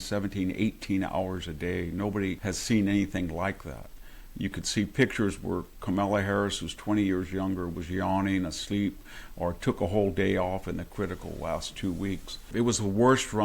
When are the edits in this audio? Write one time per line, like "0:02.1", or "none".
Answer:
0:02.4
0:12.4